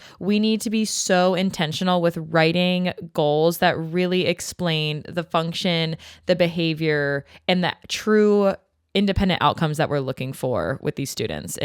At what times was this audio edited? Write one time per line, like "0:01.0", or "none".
none